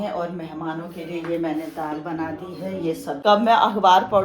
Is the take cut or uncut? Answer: cut